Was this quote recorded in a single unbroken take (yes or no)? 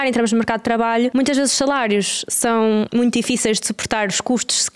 no